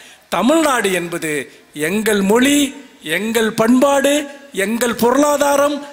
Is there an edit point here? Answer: no; 0 cuts

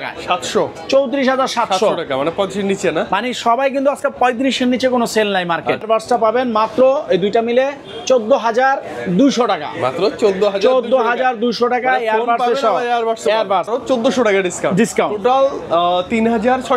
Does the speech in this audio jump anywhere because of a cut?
yes; 2 cuts; at 5.8 s, 13.7 s

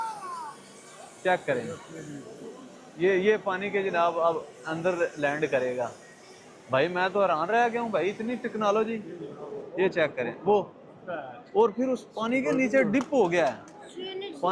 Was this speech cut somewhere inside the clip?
no; 0 cuts

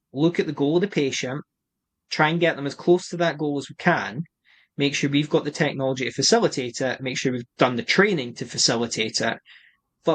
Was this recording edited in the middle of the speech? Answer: no; 0 cuts

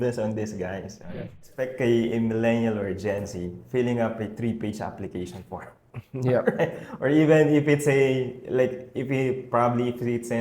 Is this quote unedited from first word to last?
no; 1 cut; at 1.5 s

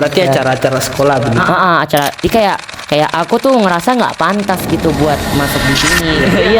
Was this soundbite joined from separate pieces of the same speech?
yes; 1 cut; at 2.2 s

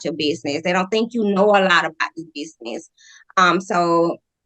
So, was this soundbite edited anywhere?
no; 0 cuts

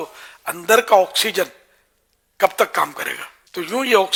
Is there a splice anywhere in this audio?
no; 0 cuts

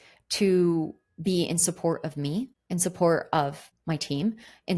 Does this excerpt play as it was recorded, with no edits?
no; 2 cuts; at 2.6 s, 3.7 s

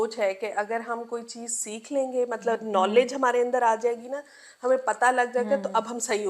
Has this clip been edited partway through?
no; 0 cuts

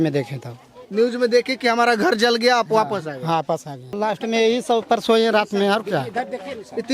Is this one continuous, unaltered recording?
no; 1 cut; at 4.0 s

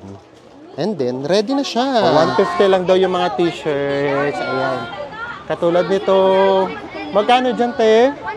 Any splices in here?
yes; 1 cut; at 2.1 s

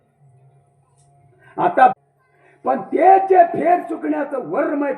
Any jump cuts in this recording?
yes; 1 cut; at 2.0 s

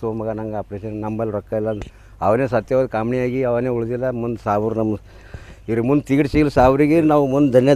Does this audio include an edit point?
no; 0 cuts

